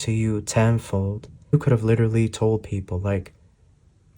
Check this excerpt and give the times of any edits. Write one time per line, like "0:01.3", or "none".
0:01.5